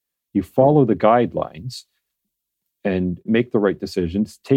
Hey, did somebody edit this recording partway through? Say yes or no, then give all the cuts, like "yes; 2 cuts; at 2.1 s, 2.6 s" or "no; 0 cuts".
yes; 1 cut; at 3.3 s